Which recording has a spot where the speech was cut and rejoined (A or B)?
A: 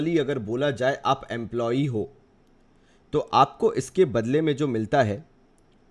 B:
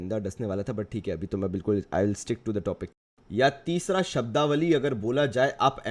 B